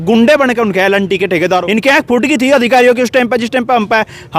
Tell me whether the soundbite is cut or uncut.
cut